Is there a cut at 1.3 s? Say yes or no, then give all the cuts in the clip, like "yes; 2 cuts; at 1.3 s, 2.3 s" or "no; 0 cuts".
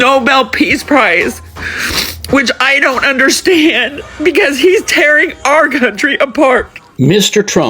no; 1 cut; at 6.8 s